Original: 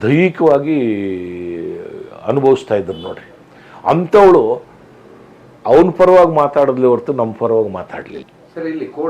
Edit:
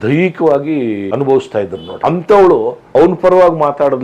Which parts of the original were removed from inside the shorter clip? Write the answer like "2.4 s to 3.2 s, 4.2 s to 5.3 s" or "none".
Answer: 1.1 s to 2.2 s, 3.0 s to 3.7 s, 4.7 s to 5.6 s